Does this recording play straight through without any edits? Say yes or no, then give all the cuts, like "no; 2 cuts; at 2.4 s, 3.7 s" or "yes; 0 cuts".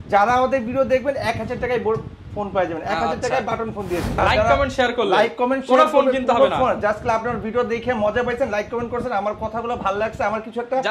no; 1 cut; at 4.2 s